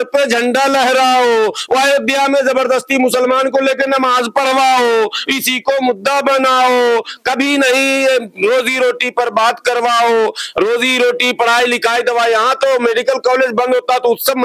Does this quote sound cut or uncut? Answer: uncut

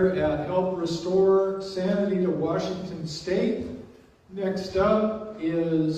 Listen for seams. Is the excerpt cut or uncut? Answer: uncut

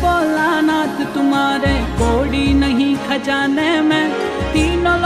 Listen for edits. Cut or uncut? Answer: uncut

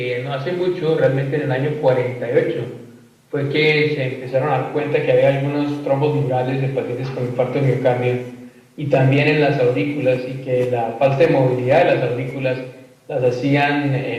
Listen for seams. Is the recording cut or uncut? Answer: cut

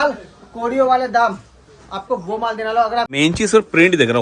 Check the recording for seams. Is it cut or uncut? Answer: cut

